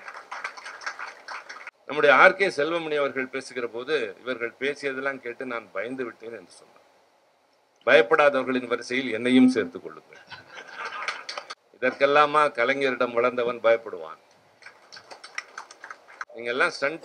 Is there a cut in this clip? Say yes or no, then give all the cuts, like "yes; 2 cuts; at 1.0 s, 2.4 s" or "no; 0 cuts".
yes; 3 cuts; at 1.7 s, 11.6 s, 16.3 s